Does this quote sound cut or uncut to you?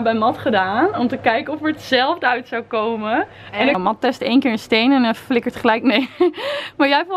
cut